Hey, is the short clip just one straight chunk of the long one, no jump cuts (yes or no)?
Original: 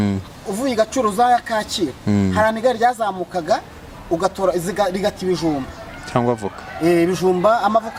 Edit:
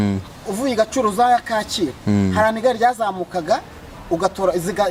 yes